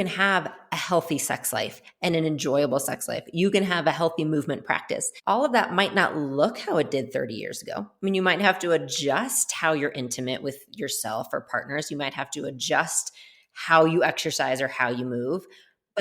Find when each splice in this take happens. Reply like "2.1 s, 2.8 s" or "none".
5.1 s